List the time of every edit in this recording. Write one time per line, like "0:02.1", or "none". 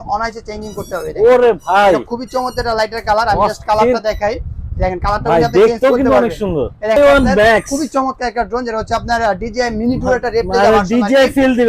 0:07.0